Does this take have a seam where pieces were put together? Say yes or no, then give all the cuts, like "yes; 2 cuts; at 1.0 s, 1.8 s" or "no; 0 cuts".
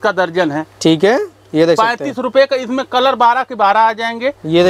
no; 0 cuts